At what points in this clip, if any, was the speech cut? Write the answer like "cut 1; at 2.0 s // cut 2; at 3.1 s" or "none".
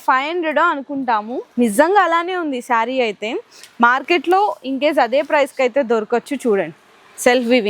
none